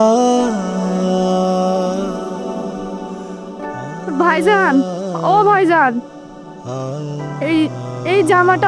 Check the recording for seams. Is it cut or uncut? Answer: uncut